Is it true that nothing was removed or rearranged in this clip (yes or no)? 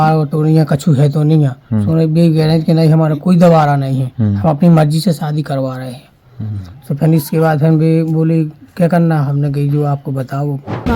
yes